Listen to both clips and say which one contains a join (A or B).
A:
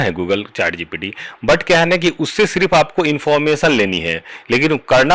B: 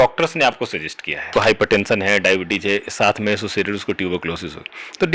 B